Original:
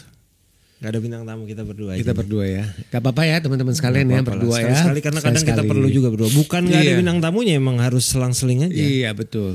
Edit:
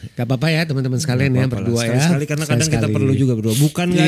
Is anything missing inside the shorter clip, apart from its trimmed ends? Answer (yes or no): no